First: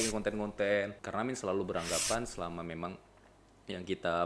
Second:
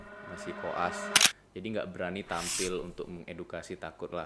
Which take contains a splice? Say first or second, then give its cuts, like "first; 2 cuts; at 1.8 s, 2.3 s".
first; 1 cut; at 1.0 s